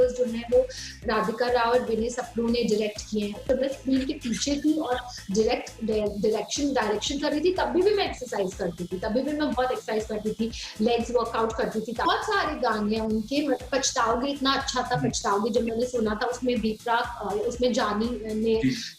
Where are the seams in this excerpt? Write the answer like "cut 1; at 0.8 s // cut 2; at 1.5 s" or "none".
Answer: cut 1; at 3.4 s // cut 2; at 12.1 s